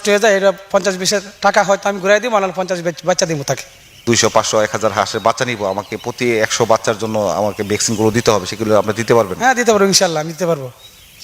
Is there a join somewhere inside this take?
yes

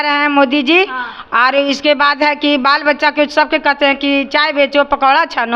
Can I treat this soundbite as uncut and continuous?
yes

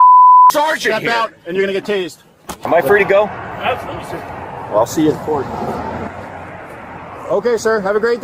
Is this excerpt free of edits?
no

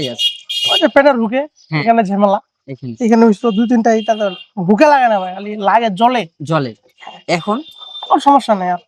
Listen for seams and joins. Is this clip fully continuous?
yes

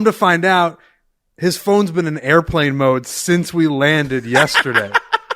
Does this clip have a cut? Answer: no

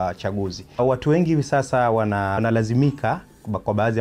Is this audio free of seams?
no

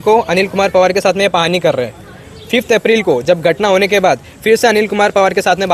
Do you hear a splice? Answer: no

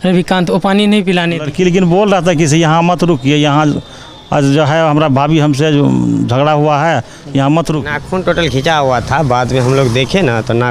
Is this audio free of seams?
no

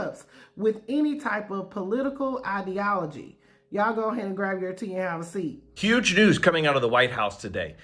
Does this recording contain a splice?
yes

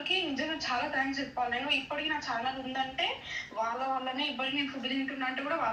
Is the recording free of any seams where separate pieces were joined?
yes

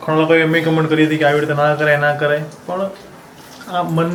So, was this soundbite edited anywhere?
no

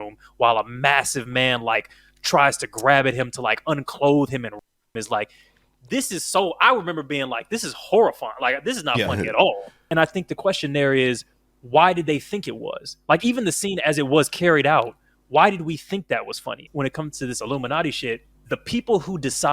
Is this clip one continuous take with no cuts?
no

